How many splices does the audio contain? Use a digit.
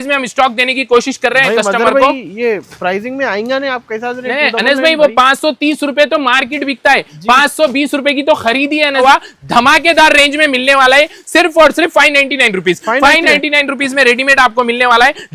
1